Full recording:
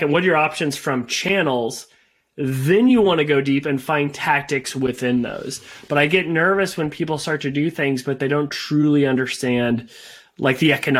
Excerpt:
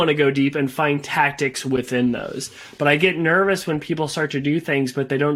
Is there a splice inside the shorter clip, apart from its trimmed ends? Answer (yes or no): no